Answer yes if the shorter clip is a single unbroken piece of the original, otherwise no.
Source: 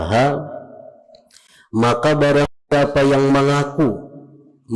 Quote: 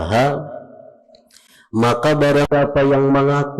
no